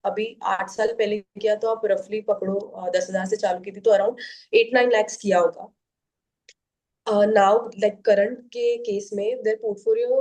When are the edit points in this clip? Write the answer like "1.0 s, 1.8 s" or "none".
none